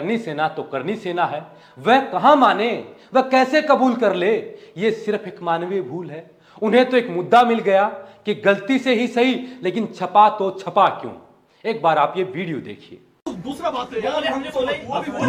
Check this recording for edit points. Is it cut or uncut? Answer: uncut